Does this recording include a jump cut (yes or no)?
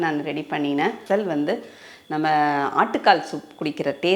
yes